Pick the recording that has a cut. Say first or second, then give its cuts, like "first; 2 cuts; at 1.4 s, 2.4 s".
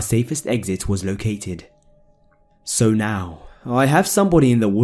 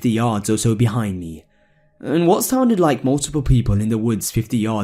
first; 1 cut; at 3.0 s